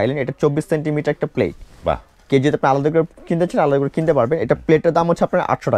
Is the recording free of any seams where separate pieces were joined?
yes; 0 cuts

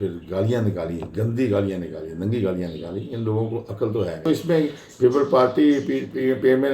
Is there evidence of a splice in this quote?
yes; 1 cut; at 4.3 s

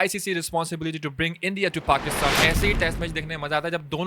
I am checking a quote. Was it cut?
yes; 1 cut; at 2.4 s

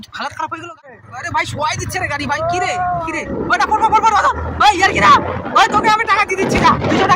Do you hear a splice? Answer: yes; 1 cut; at 1.1 s

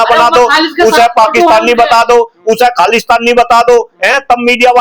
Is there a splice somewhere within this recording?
no; 0 cuts

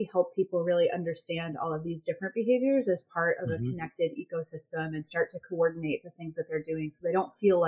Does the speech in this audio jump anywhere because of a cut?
no; 0 cuts

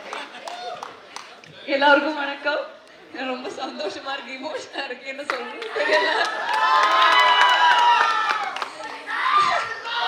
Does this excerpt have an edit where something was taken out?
no; 0 cuts

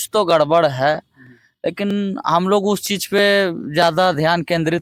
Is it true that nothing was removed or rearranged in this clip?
yes; 0 cuts

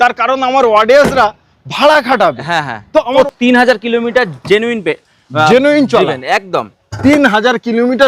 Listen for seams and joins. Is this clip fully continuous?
no; 1 cut; at 3.1 s

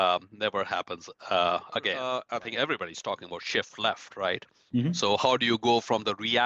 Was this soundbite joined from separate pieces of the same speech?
yes; 1 cut; at 2.1 s

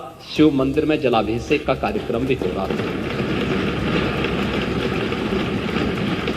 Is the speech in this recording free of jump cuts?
yes; 0 cuts

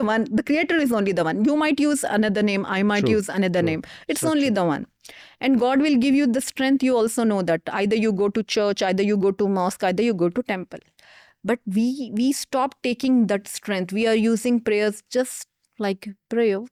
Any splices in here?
no; 0 cuts

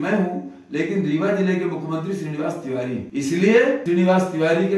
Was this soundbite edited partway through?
yes; 2 cuts; at 3.1 s, 3.8 s

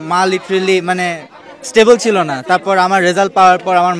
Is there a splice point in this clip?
no; 0 cuts

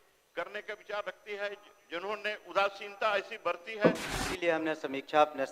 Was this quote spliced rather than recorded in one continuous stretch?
yes; 1 cut; at 4.0 s

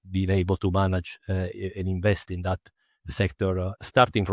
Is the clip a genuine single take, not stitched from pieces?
yes; 0 cuts

